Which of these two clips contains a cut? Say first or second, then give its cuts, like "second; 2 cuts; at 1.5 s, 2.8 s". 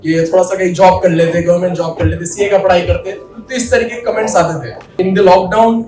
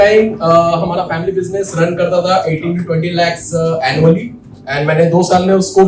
first; 1 cut; at 4.9 s